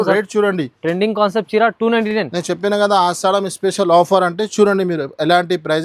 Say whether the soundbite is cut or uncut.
uncut